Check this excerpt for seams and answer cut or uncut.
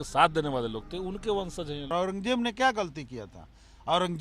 cut